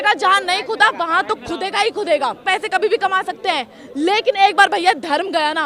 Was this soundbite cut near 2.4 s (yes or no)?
yes